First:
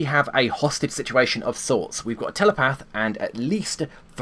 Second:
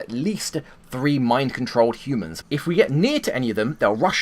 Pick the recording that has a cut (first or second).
second